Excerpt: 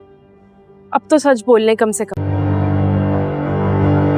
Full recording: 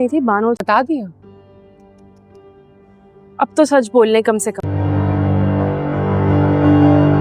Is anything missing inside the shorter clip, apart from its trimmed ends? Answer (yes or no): no